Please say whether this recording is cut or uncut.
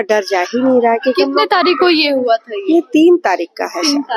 uncut